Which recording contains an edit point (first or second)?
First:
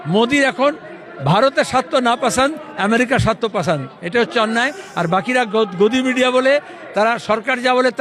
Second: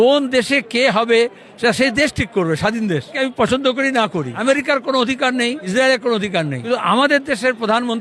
second